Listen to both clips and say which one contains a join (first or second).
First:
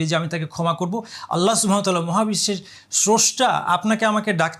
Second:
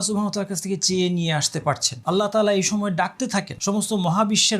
second